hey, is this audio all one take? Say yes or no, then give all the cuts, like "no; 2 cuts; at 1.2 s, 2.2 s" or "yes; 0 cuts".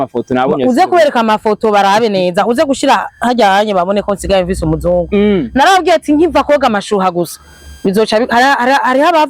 yes; 0 cuts